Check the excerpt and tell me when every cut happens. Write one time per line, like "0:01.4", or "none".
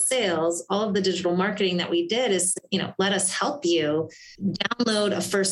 0:04.2